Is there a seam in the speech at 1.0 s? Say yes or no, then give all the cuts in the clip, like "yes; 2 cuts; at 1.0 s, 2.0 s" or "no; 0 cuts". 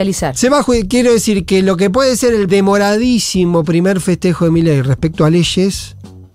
no; 1 cut; at 2.5 s